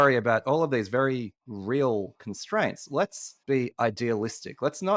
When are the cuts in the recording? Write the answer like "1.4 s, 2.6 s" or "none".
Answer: none